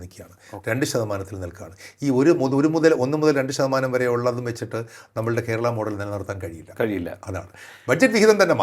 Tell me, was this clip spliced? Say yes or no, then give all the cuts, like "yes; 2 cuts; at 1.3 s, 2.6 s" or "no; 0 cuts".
no; 0 cuts